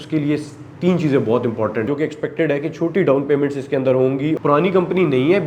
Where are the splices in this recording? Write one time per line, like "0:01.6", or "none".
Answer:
0:01.9
0:04.4